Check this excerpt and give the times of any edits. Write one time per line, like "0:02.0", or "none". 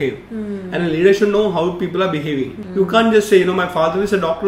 0:02.6